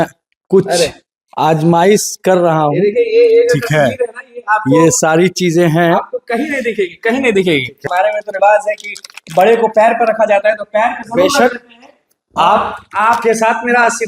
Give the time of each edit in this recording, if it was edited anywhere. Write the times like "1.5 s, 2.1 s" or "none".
7.8 s